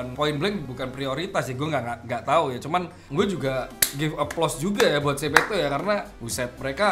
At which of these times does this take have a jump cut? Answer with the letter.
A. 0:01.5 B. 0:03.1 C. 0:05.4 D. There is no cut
B